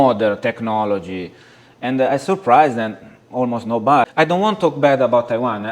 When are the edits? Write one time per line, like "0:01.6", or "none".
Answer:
0:04.0